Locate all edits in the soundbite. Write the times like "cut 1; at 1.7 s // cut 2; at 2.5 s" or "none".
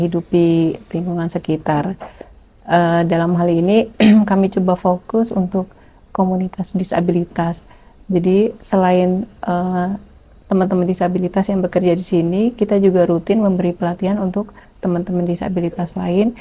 none